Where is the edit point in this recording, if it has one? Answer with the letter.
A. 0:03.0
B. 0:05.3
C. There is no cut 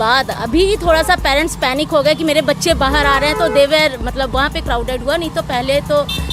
C